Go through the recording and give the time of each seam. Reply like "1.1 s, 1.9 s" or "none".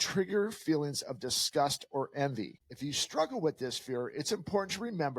2.6 s

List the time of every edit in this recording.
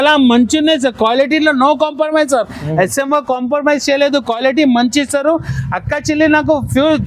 none

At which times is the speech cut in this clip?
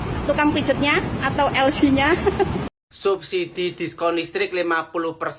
2.7 s

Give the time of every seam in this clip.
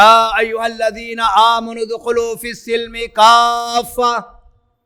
none

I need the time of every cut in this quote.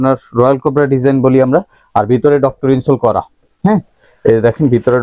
none

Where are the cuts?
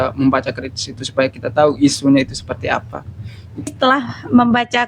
3.7 s

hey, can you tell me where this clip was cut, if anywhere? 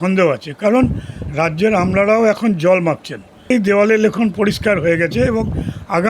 3.5 s

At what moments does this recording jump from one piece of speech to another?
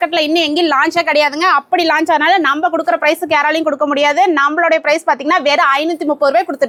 none

